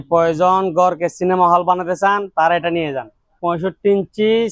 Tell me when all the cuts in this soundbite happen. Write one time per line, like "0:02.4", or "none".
0:03.3

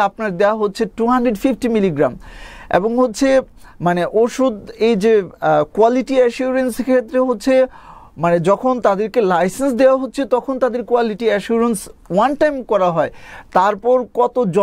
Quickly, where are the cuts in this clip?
none

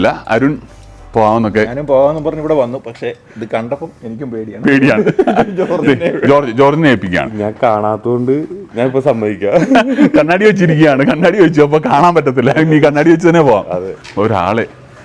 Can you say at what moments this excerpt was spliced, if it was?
0:14.0

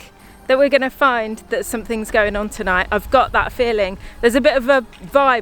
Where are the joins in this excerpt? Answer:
none

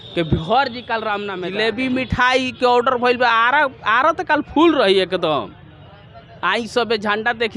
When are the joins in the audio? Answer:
0:01.2

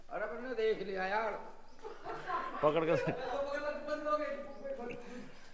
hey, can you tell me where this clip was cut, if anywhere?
none

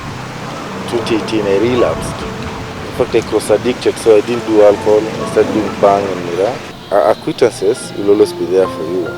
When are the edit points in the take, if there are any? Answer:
0:06.7

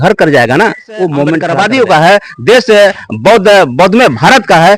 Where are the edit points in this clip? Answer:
0:01.5

